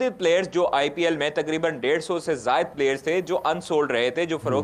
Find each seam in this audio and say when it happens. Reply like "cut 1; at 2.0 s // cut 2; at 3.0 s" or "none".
none